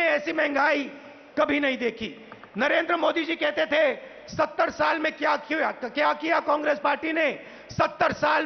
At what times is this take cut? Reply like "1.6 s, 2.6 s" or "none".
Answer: none